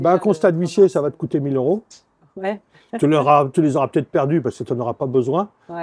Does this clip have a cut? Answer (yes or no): no